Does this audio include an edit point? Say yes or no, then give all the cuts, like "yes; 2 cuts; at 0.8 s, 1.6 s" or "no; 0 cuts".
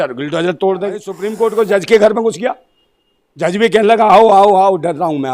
yes; 1 cut; at 1.2 s